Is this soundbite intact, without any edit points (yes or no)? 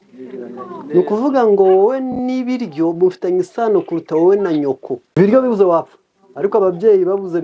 no